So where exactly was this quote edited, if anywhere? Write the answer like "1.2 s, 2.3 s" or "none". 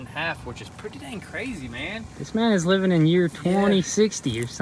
none